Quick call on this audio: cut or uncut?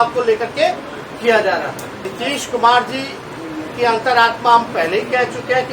cut